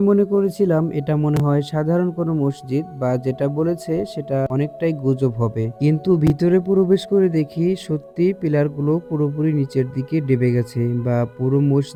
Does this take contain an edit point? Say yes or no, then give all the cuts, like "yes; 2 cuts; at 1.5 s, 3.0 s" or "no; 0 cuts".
no; 0 cuts